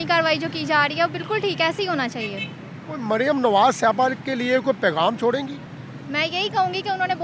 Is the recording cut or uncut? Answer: uncut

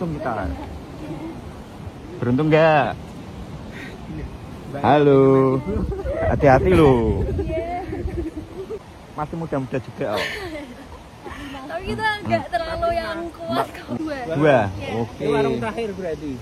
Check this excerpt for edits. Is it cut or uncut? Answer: cut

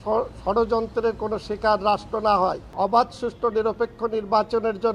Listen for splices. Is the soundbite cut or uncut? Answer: cut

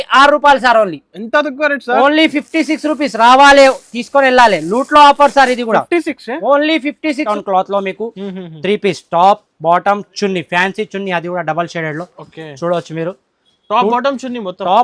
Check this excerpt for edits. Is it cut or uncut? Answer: cut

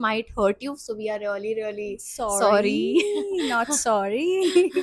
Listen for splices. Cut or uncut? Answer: uncut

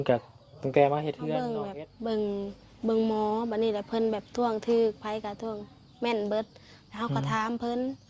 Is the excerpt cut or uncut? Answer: cut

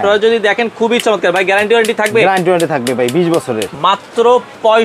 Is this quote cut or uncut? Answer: cut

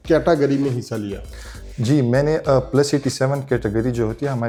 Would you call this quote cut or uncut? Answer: uncut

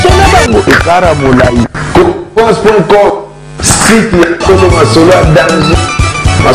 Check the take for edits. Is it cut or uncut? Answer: uncut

